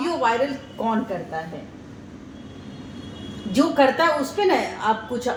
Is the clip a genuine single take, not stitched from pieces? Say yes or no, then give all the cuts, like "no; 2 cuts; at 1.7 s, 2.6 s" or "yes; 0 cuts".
yes; 0 cuts